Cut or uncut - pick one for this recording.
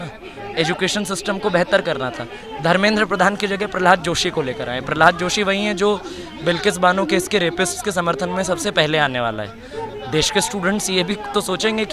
uncut